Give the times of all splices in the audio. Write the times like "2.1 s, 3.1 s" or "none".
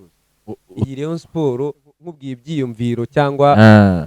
2.3 s